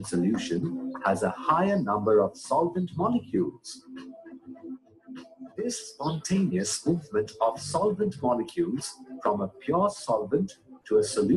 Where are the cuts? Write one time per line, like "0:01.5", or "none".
none